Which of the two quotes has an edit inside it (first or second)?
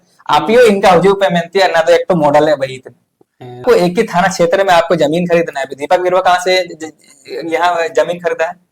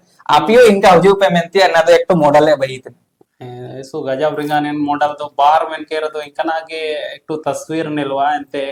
first